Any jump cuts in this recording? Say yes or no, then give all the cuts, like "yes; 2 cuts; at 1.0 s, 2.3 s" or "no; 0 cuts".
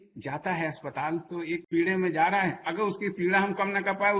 yes; 1 cut; at 1.6 s